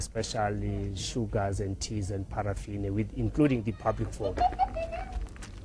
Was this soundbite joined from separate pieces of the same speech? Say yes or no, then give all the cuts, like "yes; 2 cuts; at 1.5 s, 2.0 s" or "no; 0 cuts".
no; 0 cuts